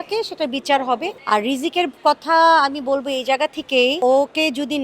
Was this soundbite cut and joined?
yes; 2 cuts; at 1.1 s, 4.0 s

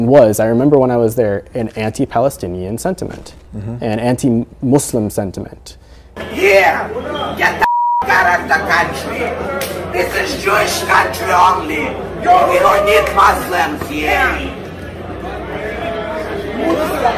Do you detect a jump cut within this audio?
no; 0 cuts

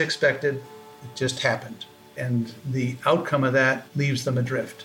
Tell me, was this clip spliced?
yes; 2 cuts; at 2.6 s, 3.9 s

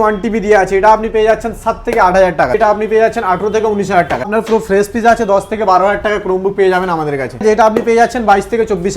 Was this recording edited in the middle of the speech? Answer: yes; 3 cuts; at 2.5 s, 4.3 s, 7.4 s

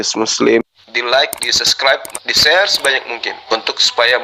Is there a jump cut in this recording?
no; 0 cuts

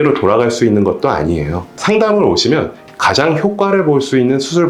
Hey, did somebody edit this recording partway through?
yes; 2 cuts; at 1.7 s, 2.8 s

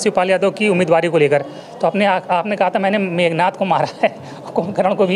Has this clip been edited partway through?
no; 0 cuts

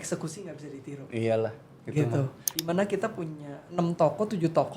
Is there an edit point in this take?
yes; 1 cut; at 2.5 s

